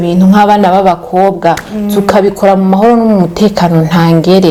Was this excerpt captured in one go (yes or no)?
yes